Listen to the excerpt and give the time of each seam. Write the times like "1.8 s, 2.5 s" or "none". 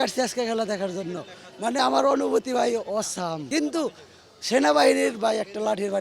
3.5 s

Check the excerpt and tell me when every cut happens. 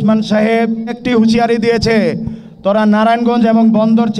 1.0 s

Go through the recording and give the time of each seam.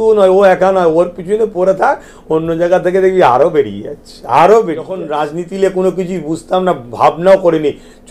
5.1 s

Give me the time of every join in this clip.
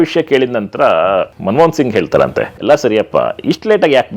1.3 s, 2.5 s

